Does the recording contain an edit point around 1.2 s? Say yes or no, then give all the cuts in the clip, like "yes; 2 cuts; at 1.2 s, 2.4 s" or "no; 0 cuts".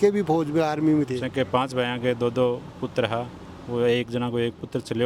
yes; 1 cut; at 1.2 s